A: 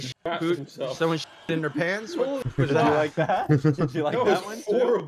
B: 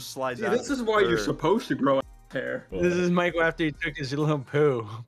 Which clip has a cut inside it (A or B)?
B